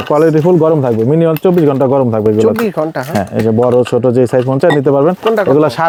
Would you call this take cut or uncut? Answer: uncut